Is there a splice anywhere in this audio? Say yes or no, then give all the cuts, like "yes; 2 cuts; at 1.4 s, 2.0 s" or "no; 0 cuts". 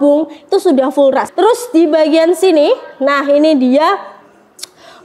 yes; 1 cut; at 1.3 s